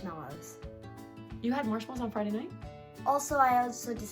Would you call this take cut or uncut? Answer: cut